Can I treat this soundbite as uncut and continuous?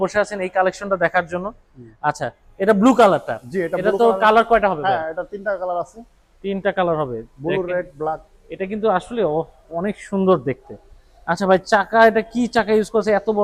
yes; 0 cuts

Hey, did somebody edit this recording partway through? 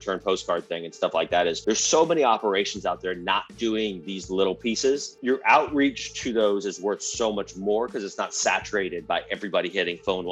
yes; 2 cuts; at 1.6 s, 5.1 s

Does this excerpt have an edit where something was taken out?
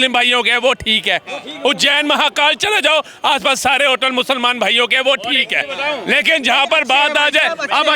no; 0 cuts

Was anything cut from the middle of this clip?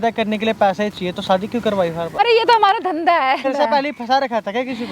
yes; 2 cuts; at 2.2 s, 3.5 s

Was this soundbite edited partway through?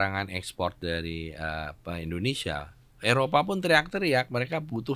no; 0 cuts

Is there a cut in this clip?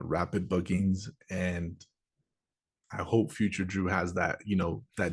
no; 0 cuts

